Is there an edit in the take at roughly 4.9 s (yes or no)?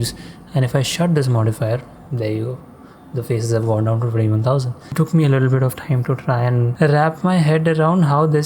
yes